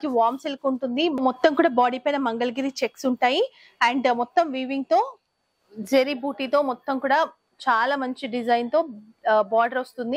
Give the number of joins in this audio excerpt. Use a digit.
0